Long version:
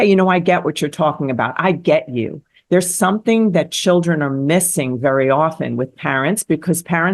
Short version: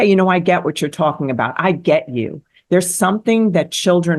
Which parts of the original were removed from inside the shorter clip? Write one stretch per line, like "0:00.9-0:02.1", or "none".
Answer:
none